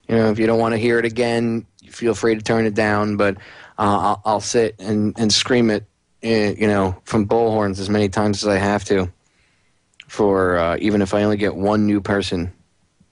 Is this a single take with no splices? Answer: no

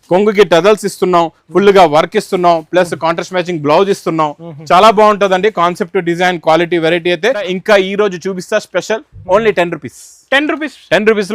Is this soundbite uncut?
no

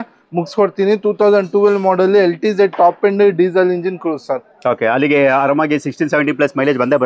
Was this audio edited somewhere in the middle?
no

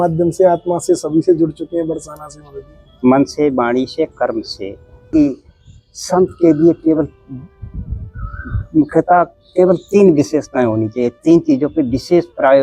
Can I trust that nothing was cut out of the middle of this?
no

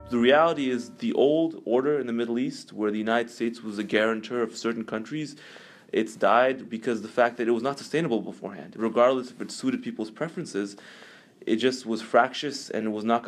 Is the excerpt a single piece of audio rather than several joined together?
no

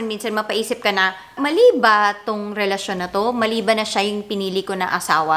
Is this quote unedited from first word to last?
yes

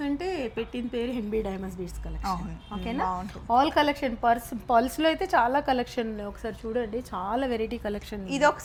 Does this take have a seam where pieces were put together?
no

